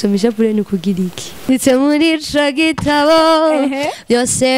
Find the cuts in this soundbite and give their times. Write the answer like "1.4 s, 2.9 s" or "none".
1.5 s